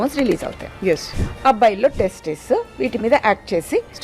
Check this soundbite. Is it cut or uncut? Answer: cut